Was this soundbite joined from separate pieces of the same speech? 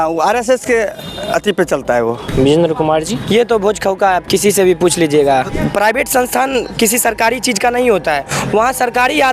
yes; 2 cuts; at 2.3 s, 5.5 s

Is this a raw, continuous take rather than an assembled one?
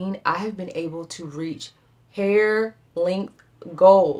yes; 0 cuts

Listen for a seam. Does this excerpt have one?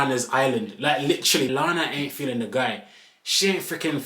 yes; 1 cut; at 1.5 s

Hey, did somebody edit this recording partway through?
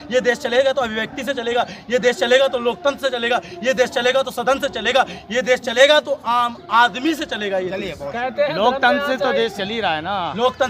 no; 0 cuts

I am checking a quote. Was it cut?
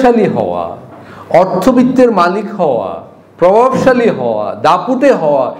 no; 0 cuts

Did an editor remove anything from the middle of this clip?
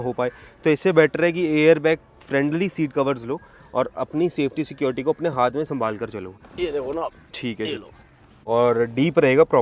yes; 2 cuts; at 6.4 s, 8.3 s

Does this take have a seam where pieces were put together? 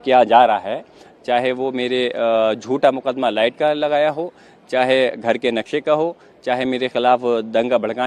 no; 0 cuts

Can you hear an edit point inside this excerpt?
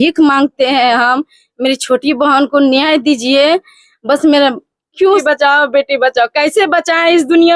yes; 1 cut; at 5.2 s

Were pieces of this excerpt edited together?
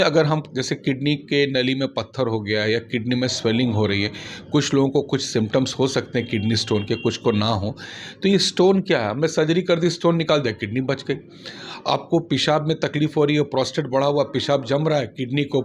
no; 0 cuts

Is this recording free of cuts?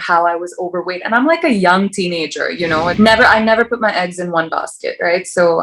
no; 1 cut; at 2.9 s

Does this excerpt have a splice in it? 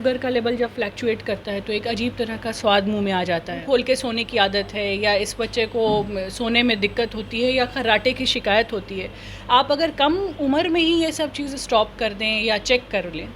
yes; 1 cut; at 3.6 s

